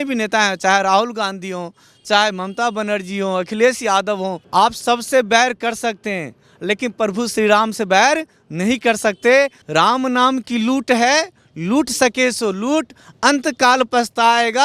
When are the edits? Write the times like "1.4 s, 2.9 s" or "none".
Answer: 4.4 s, 9.6 s